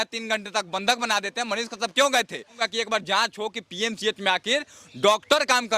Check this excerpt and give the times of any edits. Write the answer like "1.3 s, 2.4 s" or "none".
2.6 s